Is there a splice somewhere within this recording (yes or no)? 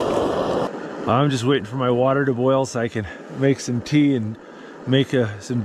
no